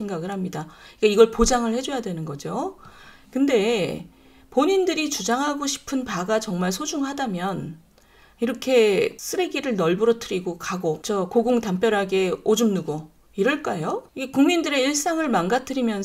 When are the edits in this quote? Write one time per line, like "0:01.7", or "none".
0:09.2
0:11.0
0:14.1